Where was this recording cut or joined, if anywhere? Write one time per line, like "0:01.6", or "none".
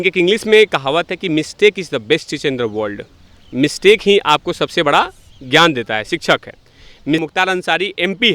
0:07.2